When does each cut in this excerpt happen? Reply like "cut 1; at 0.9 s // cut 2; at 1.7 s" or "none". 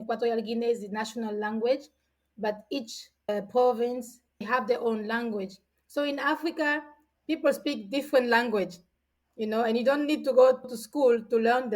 cut 1; at 4.4 s